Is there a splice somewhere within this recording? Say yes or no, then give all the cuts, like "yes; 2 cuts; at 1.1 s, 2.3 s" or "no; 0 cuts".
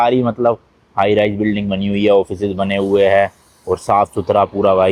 no; 0 cuts